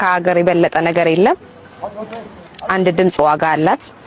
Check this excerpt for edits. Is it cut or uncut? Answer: uncut